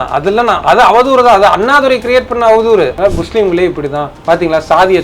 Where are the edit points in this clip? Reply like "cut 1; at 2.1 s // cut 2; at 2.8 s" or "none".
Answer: cut 1; at 3.0 s // cut 2; at 4.1 s